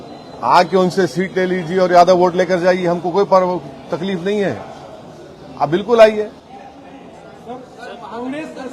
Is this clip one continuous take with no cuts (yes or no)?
yes